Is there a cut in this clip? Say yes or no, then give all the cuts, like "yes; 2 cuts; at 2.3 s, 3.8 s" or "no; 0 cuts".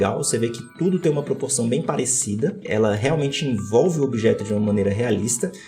yes; 1 cut; at 2.6 s